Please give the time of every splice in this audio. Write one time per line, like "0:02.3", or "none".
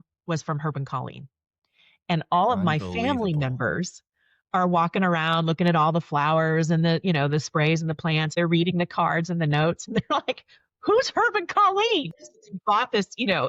0:08.3
0:12.0